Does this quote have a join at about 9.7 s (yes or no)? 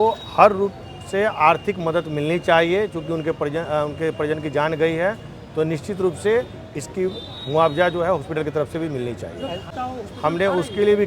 yes